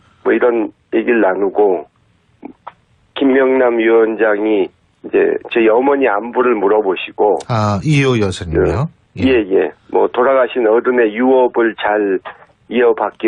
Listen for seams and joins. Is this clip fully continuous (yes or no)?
no